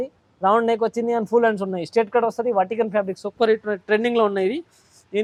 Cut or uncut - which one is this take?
uncut